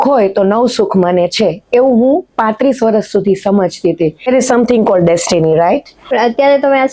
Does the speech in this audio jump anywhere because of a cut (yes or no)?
yes